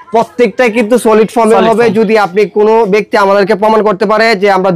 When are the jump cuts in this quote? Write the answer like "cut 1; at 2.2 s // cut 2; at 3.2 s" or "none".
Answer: none

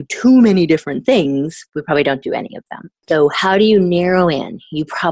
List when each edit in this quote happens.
cut 1; at 3.0 s

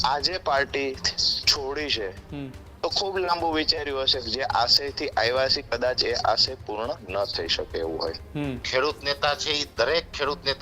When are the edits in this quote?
cut 1; at 8.6 s

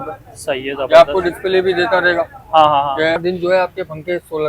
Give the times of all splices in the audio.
cut 1; at 3.2 s

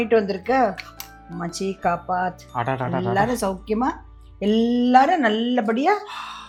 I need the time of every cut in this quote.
none

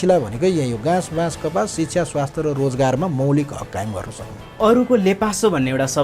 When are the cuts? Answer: cut 1; at 4.4 s

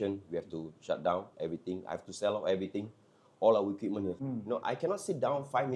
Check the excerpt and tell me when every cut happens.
cut 1; at 4.2 s

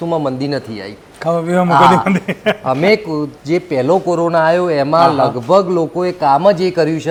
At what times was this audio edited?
none

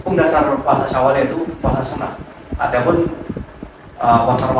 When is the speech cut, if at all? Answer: none

